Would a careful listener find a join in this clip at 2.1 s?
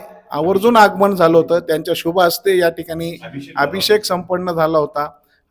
no; 0 cuts

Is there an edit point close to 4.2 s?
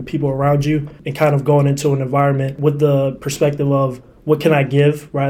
no; 1 cut; at 2.5 s

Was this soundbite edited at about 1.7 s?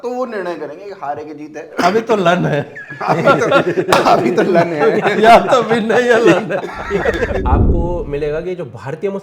yes; 2 cuts; at 1.7 s, 7.4 s

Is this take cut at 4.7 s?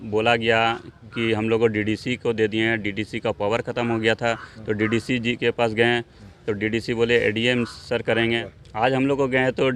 no; 1 cut; at 8.5 s

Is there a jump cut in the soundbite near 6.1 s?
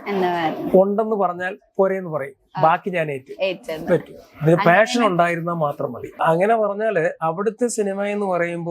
yes; 1 cut; at 6.1 s

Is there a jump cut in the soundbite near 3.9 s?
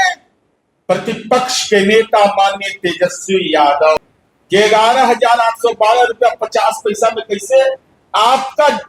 yes; 1 cut; at 3.9 s

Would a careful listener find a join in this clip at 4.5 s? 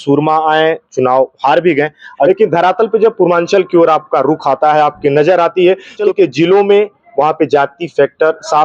no; 2 cuts; at 2.3 s, 6.0 s

